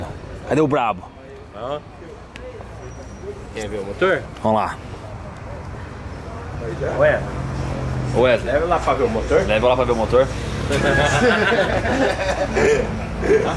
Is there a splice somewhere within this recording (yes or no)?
no